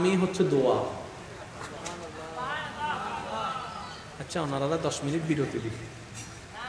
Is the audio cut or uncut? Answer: uncut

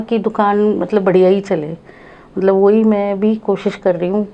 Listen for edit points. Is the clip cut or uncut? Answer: uncut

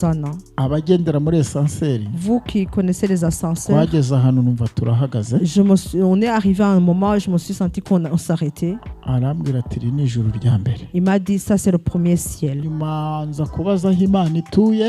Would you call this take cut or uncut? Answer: cut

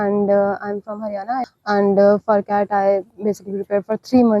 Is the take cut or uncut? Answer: cut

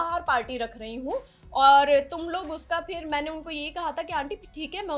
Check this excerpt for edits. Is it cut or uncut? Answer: uncut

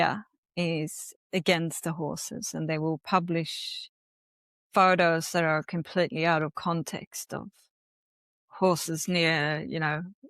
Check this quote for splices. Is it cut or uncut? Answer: uncut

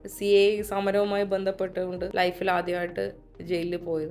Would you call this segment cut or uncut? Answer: cut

